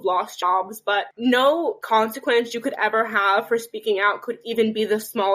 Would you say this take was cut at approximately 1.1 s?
yes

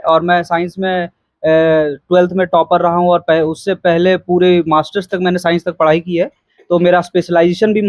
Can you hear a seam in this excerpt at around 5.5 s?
no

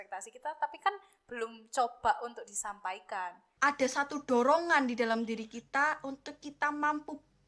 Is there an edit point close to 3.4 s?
yes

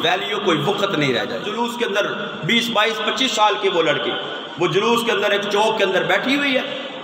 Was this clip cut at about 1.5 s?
yes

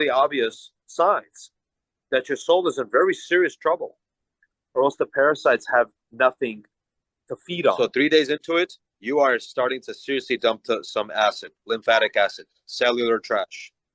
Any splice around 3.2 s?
no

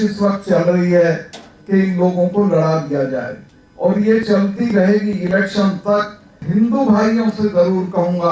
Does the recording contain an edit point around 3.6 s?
no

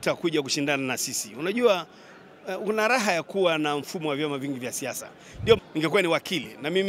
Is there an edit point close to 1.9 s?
no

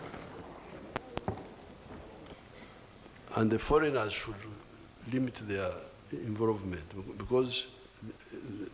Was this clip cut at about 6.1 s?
no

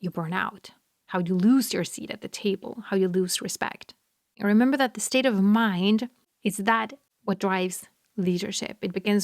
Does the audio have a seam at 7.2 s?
no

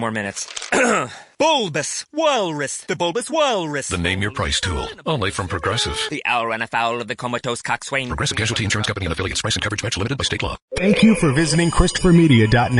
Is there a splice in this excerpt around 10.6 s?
yes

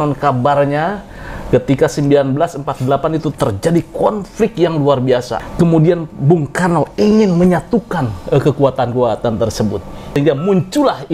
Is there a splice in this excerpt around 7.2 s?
no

